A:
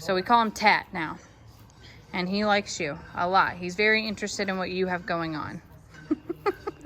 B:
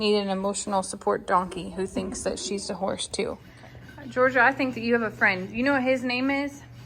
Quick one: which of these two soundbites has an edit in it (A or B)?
B